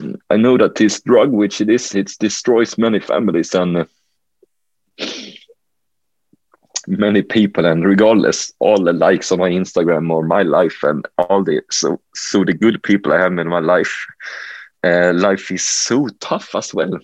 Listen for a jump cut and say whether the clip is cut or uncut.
uncut